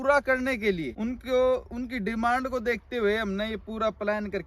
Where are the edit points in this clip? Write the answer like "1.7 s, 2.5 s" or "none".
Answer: 0.9 s